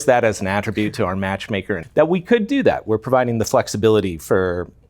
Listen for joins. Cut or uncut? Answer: cut